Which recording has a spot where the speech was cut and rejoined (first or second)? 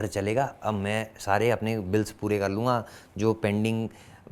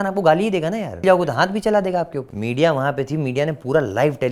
second